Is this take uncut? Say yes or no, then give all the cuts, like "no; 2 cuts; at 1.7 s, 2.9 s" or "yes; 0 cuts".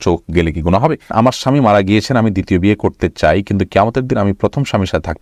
no; 1 cut; at 1.1 s